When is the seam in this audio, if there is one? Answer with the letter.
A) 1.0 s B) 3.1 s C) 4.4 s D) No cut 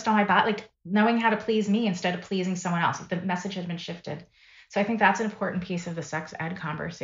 D